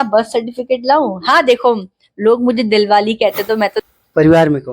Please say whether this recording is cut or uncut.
cut